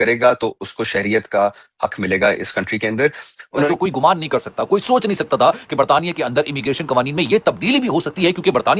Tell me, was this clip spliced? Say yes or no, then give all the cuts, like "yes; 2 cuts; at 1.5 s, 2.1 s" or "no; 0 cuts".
yes; 1 cut; at 3.7 s